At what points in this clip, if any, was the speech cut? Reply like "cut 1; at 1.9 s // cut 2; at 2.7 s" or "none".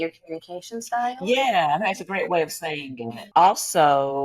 cut 1; at 3.2 s

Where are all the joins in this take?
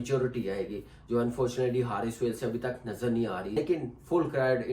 cut 1; at 3.5 s

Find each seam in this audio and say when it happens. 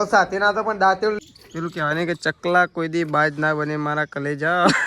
cut 1; at 1.2 s

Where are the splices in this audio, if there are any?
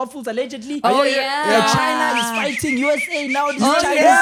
none

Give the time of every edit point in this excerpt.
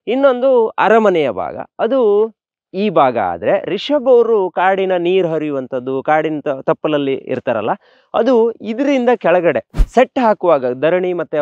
cut 1; at 9.7 s

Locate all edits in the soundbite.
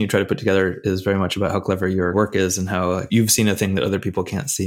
none

